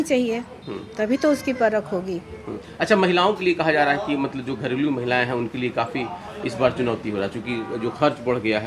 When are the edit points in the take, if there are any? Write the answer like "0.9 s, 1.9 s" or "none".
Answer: none